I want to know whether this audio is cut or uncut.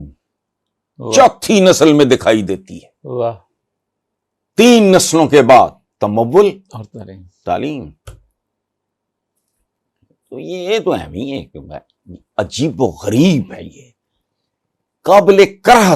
uncut